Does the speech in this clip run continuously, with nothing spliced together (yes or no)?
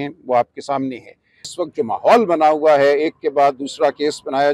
no